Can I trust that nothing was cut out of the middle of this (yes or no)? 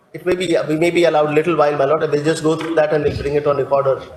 yes